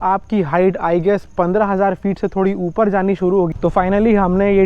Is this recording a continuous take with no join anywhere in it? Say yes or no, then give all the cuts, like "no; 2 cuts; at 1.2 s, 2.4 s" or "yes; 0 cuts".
no; 1 cut; at 3.5 s